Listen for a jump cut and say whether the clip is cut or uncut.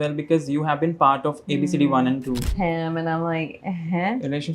cut